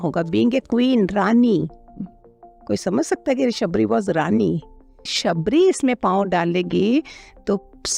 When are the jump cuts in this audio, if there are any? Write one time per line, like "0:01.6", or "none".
0:05.2

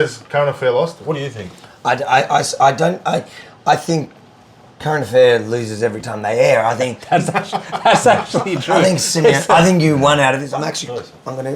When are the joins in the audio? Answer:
0:10.5

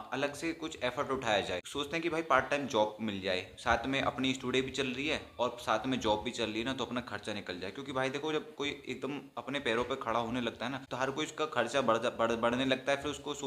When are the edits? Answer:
0:01.7
0:10.8

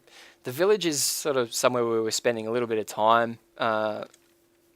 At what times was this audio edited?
0:03.7

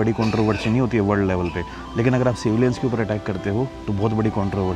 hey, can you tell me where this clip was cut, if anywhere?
0:03.8

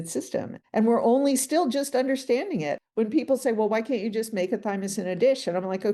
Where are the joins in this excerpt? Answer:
0:02.7

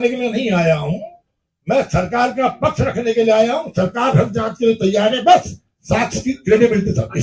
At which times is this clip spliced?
none

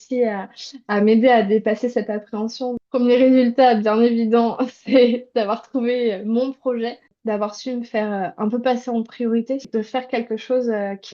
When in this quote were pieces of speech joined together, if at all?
0:02.7
0:07.1
0:09.6

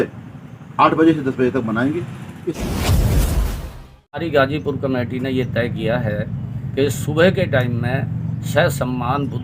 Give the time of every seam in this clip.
0:02.6
0:04.2

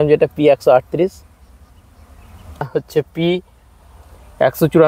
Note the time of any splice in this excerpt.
0:02.7

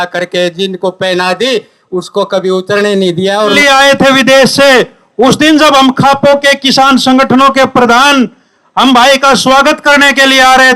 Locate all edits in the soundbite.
0:03.6

